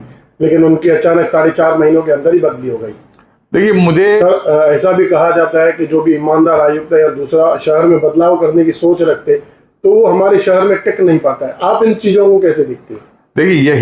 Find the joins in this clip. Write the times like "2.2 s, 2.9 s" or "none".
4.2 s